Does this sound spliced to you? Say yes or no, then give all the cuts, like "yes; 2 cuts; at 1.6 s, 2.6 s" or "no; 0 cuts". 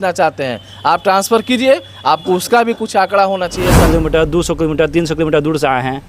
yes; 1 cut; at 3.8 s